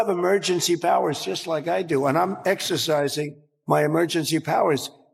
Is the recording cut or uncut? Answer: uncut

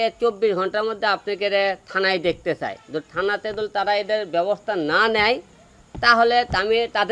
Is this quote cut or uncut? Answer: uncut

